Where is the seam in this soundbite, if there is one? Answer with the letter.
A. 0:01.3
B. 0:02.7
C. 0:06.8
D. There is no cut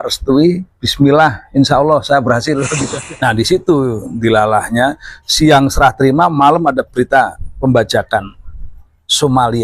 B